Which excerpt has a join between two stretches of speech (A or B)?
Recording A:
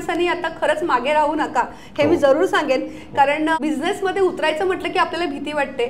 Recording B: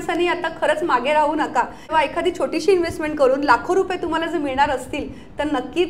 B